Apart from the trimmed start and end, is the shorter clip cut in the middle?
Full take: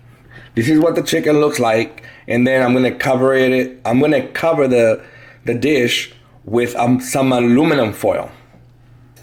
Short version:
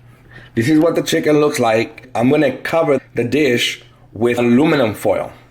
yes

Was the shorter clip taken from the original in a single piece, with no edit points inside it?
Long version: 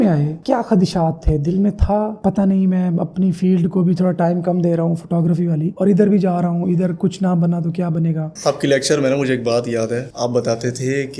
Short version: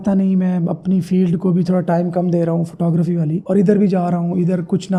yes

